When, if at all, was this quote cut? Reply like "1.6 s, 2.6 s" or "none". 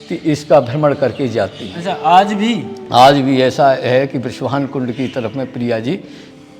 none